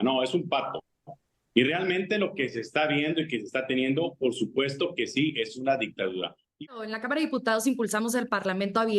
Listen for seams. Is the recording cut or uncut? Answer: cut